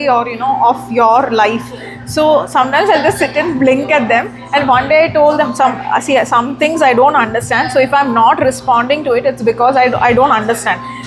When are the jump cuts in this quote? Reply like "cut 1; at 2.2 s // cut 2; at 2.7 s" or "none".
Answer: none